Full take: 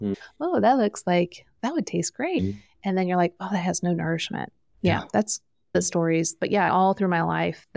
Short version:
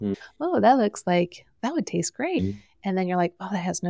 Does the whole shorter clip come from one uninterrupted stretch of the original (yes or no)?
yes